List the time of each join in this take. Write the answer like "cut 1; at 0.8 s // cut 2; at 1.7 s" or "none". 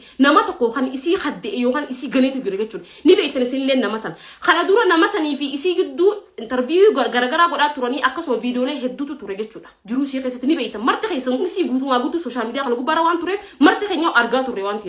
none